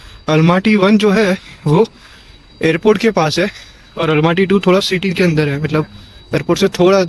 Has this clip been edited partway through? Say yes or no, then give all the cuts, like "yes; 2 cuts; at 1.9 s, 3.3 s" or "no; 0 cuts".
no; 0 cuts